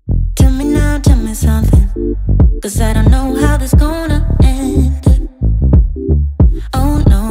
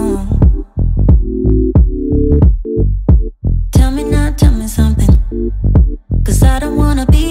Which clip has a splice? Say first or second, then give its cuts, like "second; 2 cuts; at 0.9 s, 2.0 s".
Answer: first; 1 cut; at 6.3 s